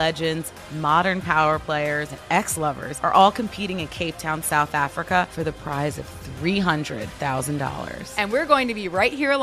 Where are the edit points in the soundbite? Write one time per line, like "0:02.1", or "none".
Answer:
0:02.5
0:05.3